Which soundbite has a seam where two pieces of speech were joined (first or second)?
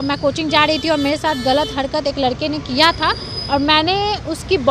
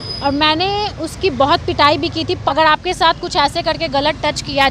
second